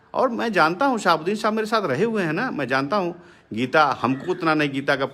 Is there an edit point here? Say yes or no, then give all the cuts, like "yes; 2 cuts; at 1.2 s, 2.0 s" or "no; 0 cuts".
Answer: no; 0 cuts